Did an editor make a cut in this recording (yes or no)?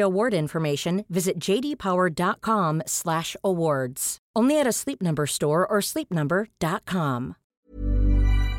yes